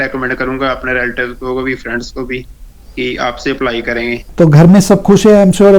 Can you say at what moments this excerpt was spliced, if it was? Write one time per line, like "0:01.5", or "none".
0:04.2